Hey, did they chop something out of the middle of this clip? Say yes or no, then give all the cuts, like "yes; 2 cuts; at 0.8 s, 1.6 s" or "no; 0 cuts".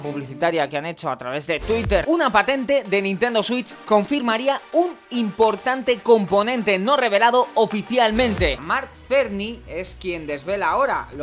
yes; 2 cuts; at 2.0 s, 8.7 s